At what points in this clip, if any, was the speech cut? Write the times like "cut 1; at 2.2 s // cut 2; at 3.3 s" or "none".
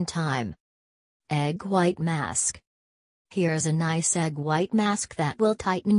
cut 1; at 2.0 s